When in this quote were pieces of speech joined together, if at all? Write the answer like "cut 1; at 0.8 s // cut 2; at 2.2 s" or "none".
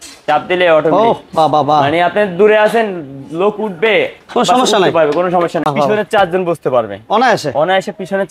cut 1; at 5.6 s